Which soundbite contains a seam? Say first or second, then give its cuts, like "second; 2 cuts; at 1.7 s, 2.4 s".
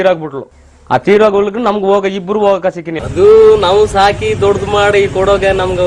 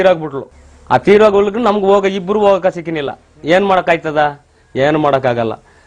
first; 1 cut; at 3.0 s